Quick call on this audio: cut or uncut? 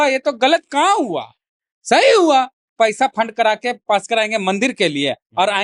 cut